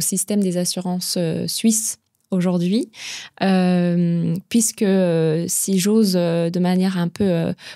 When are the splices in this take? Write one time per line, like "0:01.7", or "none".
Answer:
none